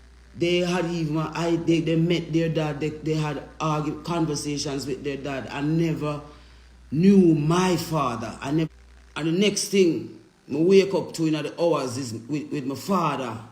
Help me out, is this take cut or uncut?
cut